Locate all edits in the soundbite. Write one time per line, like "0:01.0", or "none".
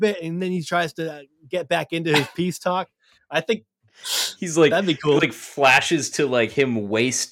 none